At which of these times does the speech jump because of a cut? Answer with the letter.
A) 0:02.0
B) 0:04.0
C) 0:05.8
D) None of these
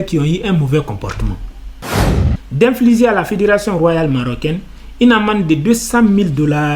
A